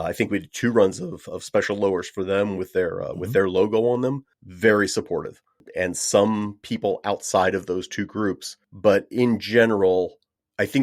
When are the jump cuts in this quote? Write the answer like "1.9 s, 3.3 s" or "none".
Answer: 5.6 s